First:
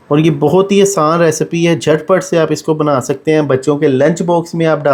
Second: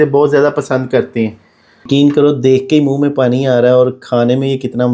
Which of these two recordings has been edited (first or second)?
second